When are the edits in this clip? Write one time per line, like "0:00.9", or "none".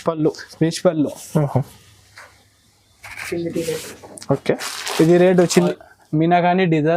0:05.6